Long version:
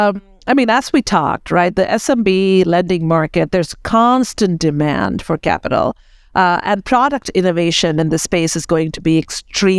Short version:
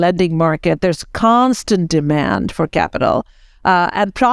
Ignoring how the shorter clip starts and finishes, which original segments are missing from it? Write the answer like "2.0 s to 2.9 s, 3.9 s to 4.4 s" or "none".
none